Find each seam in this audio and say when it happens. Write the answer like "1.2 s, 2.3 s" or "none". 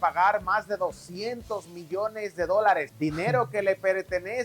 2.9 s